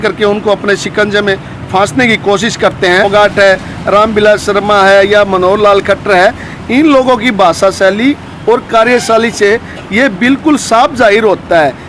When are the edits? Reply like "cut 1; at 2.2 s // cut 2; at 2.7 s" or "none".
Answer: cut 1; at 3.1 s

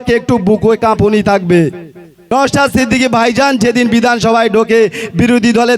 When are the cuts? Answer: cut 1; at 2.3 s

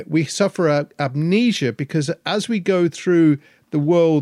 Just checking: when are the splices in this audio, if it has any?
none

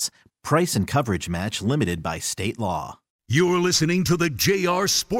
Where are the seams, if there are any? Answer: cut 1; at 3.0 s

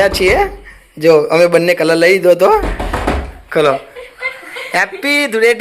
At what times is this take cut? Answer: cut 1; at 2.7 s

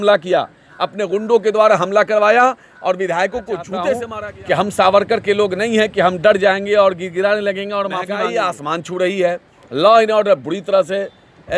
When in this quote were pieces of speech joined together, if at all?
cut 1; at 4.2 s // cut 2; at 8.1 s

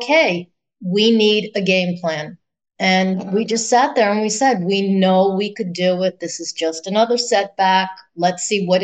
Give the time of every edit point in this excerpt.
none

